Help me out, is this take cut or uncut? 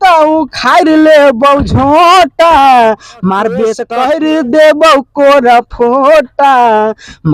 cut